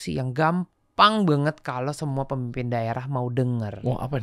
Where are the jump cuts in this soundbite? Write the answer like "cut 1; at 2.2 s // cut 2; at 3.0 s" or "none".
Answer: none